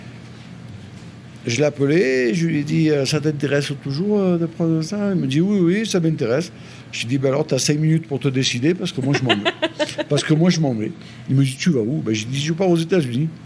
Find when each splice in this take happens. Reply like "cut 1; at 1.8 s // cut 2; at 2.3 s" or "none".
none